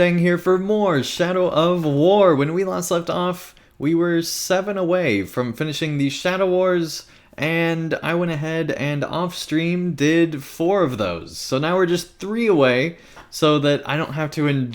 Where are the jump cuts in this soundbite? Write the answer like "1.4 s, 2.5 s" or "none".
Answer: 1.1 s

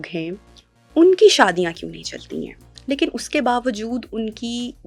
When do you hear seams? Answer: 2.7 s

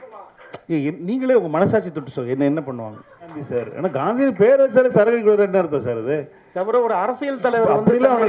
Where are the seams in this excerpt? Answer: 3.5 s

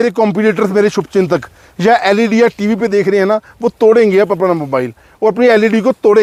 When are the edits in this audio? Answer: none

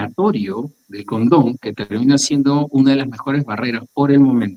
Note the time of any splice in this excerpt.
none

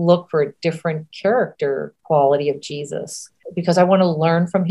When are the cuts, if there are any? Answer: 1.9 s, 3.5 s

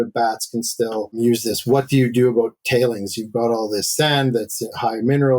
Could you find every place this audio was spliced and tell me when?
1.2 s

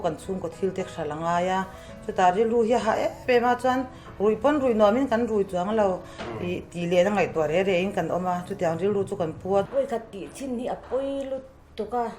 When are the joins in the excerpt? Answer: 9.7 s

